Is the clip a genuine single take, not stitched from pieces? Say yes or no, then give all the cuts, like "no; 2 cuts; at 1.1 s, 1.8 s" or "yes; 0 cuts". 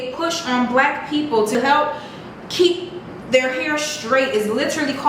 no; 1 cut; at 1.5 s